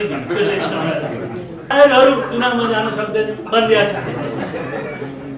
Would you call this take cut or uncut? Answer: cut